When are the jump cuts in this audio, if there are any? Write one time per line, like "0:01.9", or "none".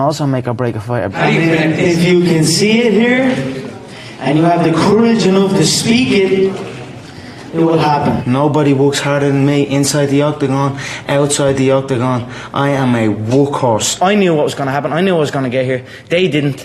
0:01.1
0:08.2
0:14.0

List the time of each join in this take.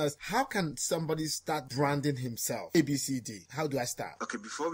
0:02.7

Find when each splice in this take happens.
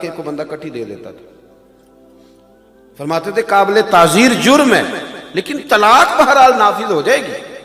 0:01.3
0:02.7

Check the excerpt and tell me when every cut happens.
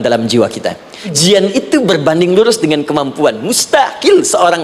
0:01.1

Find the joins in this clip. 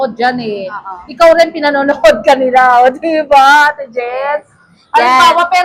none

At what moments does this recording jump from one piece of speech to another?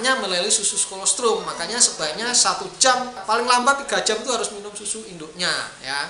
0:03.1

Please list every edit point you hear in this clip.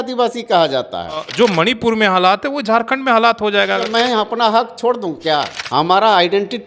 0:01.3
0:03.9
0:05.6

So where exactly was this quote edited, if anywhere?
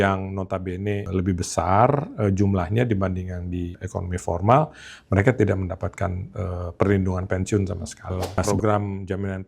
0:01.0
0:03.8
0:08.4

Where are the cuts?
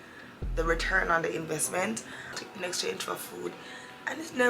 0:02.2

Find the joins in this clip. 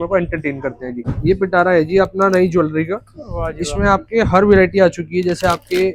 0:01.1

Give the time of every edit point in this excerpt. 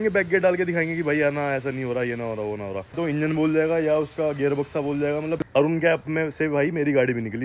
0:03.0
0:05.4

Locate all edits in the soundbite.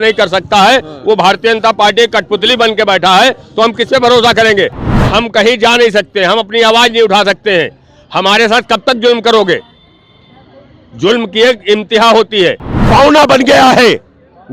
0:04.9
0:12.7

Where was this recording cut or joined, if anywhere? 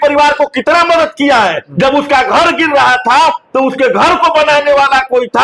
0:01.7

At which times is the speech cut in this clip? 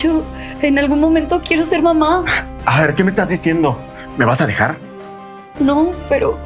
none

